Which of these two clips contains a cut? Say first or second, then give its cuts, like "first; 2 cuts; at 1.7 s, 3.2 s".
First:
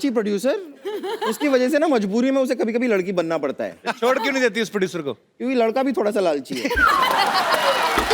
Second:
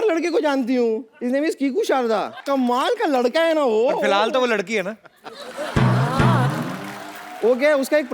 second; 2 cuts; at 1.1 s, 2.4 s